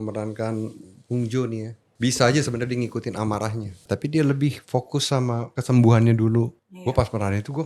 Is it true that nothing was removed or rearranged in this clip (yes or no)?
no